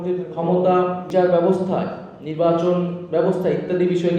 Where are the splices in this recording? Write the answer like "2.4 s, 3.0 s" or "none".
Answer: 1.1 s